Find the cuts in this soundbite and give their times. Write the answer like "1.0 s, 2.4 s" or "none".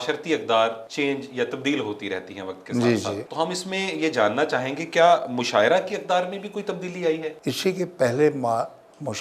0.8 s, 3.2 s, 7.3 s